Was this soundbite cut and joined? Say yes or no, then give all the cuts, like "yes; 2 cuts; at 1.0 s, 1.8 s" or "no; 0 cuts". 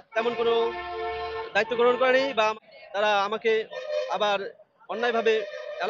yes; 1 cut; at 2.6 s